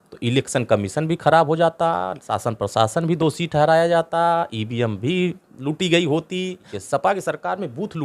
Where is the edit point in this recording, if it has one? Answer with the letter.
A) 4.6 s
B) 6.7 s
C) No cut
B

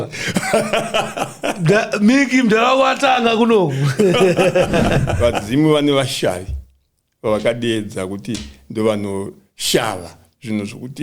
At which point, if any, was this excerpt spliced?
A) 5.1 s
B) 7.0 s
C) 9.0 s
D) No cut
A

